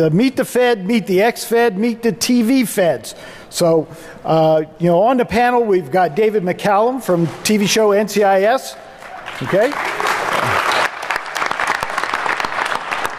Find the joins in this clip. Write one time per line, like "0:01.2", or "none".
none